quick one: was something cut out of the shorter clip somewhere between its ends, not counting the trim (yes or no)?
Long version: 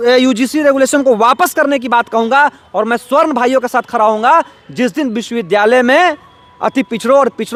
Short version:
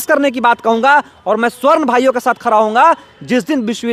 no